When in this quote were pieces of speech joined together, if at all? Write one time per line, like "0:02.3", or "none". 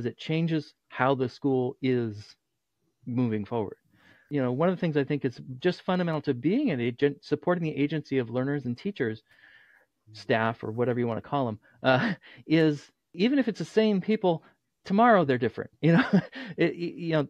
0:04.2
0:13.1